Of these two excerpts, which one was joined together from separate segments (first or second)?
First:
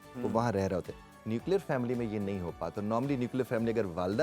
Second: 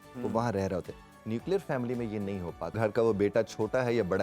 second